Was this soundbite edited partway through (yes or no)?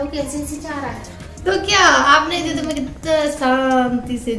yes